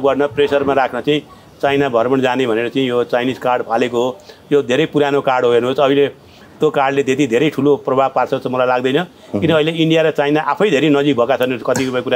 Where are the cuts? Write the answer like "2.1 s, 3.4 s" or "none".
none